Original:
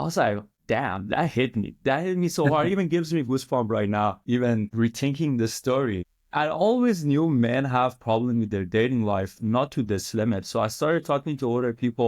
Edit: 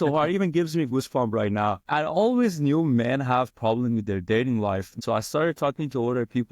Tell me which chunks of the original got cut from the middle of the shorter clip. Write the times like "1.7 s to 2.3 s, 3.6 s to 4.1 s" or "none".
4.2 s to 6.2 s, 9.4 s to 10.4 s